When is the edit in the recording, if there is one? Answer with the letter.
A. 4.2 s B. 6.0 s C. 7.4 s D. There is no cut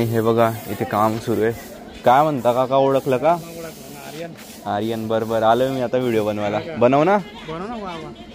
D